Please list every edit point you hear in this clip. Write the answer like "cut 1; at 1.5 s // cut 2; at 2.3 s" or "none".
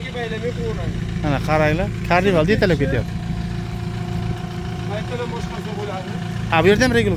none